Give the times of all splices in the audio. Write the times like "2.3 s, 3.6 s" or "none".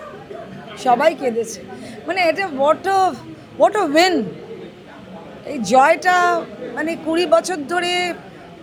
none